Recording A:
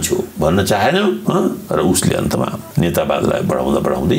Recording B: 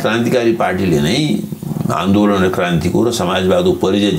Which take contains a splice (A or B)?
A